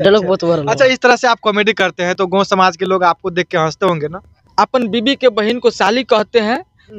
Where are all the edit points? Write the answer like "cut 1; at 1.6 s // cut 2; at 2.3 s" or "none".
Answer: cut 1; at 4.4 s